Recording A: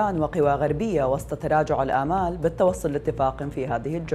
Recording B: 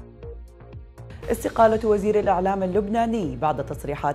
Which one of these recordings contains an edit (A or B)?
B